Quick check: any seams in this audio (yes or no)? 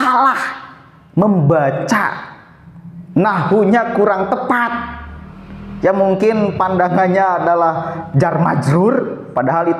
no